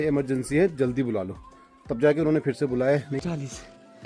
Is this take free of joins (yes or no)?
no